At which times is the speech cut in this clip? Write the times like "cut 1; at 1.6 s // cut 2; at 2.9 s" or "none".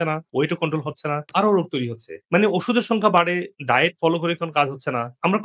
none